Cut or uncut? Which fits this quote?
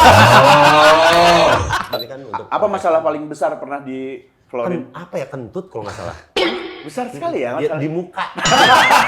cut